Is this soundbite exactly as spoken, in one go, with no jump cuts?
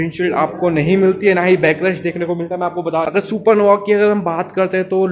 no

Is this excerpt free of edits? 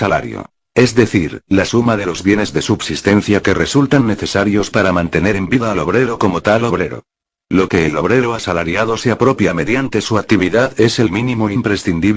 yes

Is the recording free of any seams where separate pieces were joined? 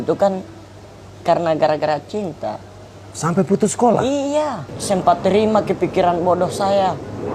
no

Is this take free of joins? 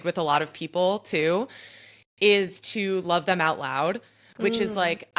yes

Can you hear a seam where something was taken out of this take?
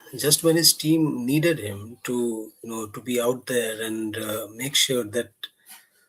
no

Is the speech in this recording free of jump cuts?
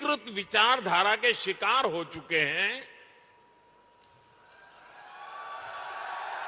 yes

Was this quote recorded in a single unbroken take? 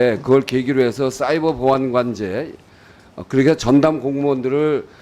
yes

